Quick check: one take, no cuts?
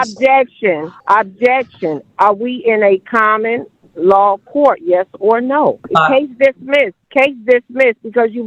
no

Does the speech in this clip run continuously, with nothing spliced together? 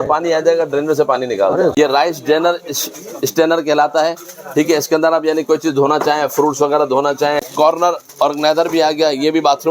no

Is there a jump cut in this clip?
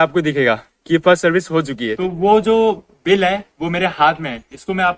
yes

